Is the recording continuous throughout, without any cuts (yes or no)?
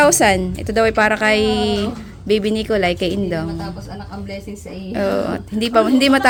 yes